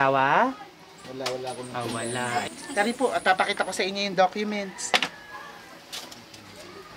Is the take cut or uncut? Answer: cut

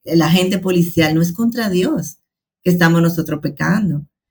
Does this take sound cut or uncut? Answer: uncut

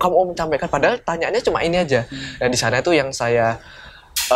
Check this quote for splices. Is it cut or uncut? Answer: uncut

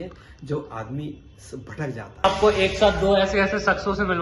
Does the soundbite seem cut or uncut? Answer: cut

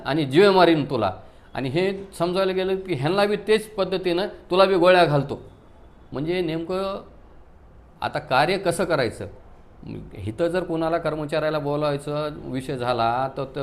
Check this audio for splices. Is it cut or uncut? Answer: uncut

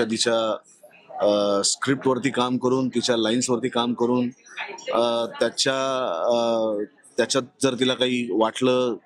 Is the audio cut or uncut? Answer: uncut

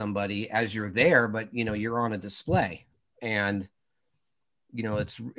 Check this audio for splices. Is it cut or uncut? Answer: uncut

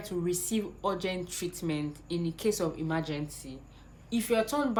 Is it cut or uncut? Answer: uncut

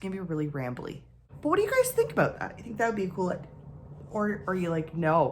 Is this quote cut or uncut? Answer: cut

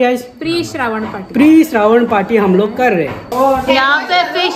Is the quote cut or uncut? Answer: uncut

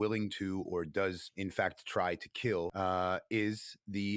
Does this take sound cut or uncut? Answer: cut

